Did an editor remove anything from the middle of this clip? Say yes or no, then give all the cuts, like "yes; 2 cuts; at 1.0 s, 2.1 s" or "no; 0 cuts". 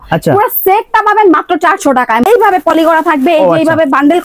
yes; 1 cut; at 2.2 s